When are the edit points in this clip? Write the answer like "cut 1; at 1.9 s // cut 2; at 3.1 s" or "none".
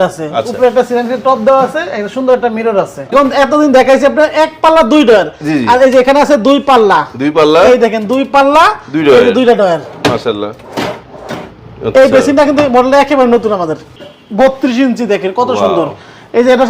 cut 1; at 3.1 s // cut 2; at 13.9 s